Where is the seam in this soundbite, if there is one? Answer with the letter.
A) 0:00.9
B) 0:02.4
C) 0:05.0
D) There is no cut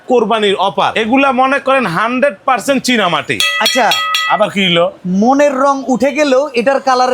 A